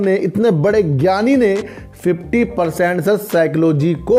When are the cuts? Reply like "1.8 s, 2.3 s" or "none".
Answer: none

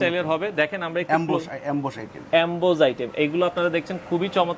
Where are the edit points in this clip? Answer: none

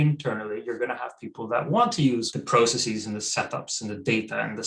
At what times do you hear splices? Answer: 2.3 s

